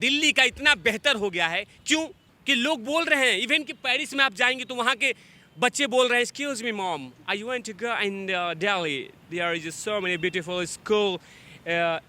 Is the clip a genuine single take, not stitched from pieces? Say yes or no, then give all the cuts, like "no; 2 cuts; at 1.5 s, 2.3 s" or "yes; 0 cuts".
no; 1 cut; at 2.3 s